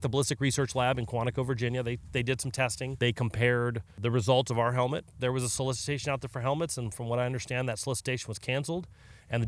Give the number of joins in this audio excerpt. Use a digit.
3